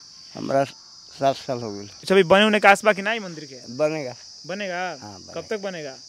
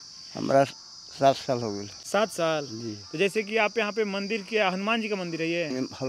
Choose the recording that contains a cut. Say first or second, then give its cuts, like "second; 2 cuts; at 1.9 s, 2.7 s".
first; 1 cut; at 2.0 s